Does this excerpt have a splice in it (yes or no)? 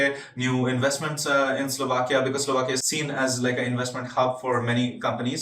yes